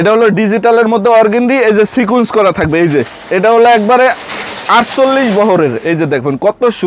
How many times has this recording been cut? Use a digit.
0